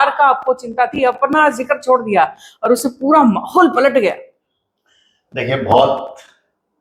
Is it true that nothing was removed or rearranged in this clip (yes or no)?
yes